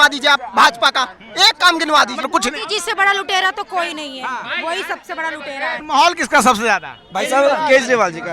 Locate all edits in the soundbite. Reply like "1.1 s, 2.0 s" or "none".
2.2 s, 5.8 s